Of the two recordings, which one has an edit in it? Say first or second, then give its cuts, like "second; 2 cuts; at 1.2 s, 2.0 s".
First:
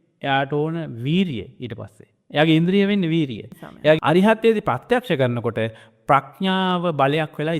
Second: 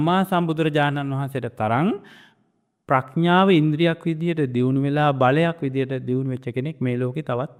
first; 1 cut; at 4.0 s